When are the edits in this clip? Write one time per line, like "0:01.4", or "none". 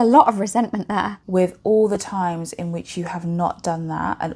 0:01.2